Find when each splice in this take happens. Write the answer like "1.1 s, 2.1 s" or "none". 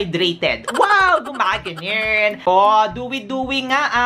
2.4 s